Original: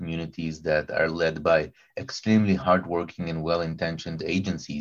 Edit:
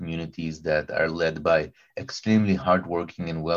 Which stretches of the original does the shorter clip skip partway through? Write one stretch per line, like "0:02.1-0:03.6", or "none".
none